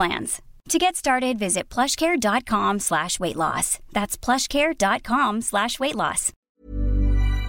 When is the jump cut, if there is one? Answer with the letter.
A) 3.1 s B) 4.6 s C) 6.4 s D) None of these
C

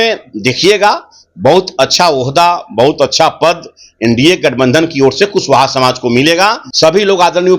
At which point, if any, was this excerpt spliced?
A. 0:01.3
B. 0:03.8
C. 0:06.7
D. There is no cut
C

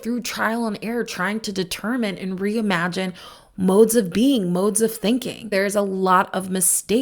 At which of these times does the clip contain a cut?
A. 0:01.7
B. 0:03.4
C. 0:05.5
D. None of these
C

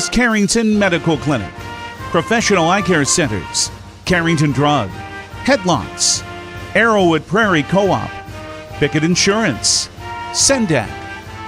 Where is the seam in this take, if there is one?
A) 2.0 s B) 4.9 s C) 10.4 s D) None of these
C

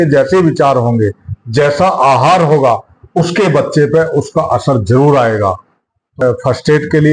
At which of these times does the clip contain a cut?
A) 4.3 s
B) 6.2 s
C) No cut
B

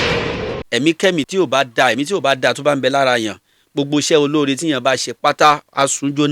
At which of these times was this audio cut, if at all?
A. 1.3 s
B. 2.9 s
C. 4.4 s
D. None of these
A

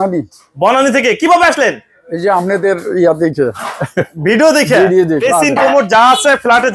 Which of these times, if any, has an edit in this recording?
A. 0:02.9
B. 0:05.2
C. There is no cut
B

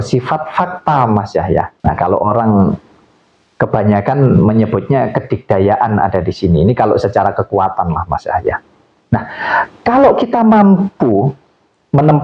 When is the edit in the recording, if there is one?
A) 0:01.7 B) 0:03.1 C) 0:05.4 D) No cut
A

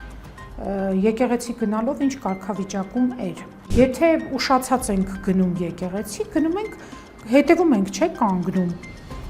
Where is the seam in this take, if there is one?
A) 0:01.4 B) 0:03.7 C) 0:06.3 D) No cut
B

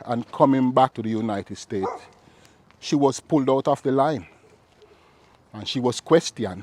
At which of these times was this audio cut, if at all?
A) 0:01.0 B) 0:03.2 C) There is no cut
A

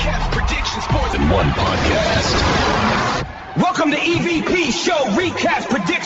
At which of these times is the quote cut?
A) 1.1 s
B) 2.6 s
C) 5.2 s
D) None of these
A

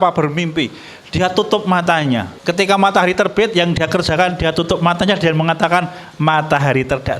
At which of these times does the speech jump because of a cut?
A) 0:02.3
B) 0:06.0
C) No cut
A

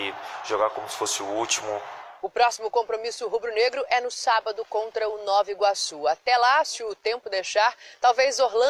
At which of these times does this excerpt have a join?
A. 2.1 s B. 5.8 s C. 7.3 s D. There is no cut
D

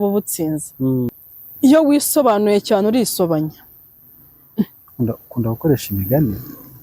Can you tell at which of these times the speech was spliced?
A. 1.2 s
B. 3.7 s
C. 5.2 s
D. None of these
A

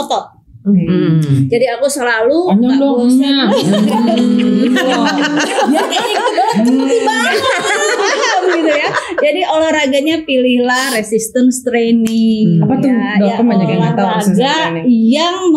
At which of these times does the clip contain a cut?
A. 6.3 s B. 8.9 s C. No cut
C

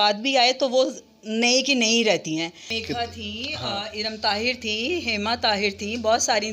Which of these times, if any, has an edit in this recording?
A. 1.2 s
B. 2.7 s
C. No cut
B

